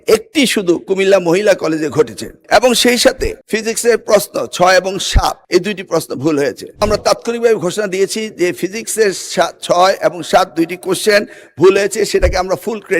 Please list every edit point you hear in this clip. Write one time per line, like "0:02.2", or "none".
0:06.8